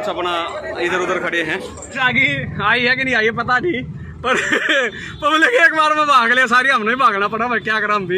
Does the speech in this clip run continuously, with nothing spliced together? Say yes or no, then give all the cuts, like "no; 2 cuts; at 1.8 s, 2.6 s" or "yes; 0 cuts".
no; 1 cut; at 1.8 s